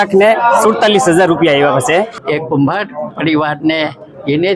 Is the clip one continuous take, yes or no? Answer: no